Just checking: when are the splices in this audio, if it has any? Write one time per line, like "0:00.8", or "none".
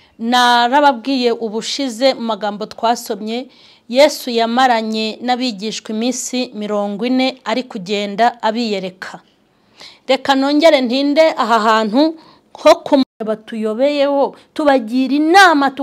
0:13.1